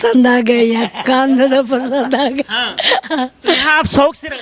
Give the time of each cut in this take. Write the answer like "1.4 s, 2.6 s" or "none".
none